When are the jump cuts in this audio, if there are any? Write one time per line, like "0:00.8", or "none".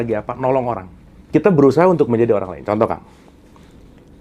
0:01.1

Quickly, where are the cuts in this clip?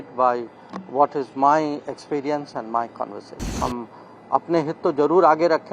0:03.5

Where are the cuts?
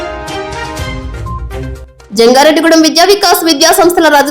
0:01.0

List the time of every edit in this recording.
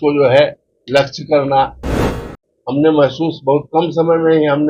0:02.1

